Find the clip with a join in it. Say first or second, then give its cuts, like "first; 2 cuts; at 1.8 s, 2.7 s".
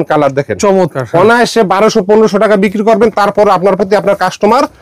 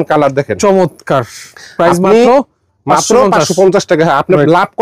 first; 1 cut; at 1.0 s